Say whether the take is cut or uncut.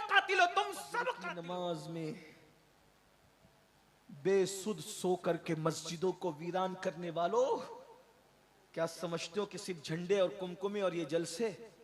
cut